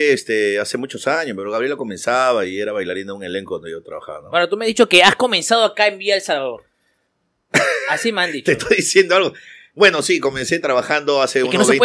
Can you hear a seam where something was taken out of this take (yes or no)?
no